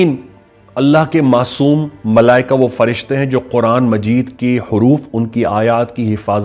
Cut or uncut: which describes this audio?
uncut